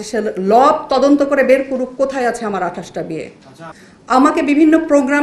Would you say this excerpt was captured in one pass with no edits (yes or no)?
yes